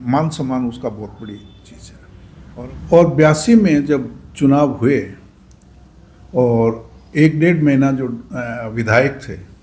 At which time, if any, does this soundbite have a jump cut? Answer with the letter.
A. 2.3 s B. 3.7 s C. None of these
A